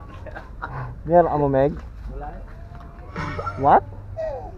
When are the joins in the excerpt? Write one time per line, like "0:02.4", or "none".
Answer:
0:03.1

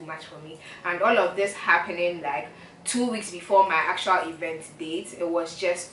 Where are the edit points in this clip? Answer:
none

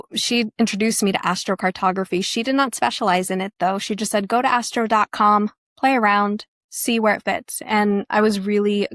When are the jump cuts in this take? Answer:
none

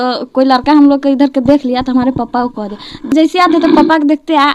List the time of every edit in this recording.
0:03.1

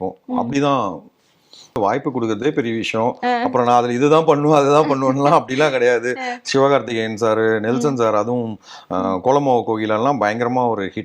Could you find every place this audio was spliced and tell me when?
0:01.8

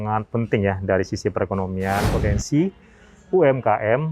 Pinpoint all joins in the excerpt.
0:02.1

